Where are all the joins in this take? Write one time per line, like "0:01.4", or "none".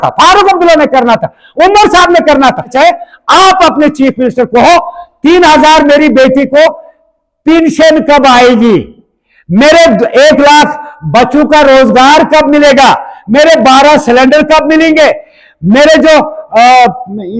0:02.7